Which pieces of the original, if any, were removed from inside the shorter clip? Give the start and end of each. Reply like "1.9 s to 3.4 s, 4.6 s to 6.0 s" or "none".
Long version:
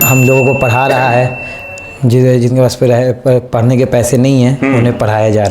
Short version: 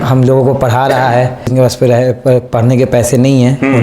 1.5 s to 2.5 s